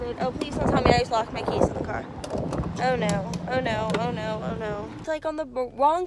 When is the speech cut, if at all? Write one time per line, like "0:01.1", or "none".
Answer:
0:05.0